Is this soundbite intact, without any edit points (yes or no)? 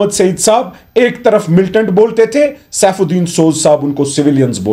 yes